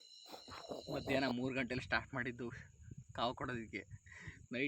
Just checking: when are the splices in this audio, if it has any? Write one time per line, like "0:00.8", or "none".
0:00.9